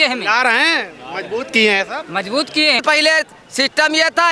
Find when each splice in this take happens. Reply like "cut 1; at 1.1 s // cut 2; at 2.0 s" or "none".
cut 1; at 2.8 s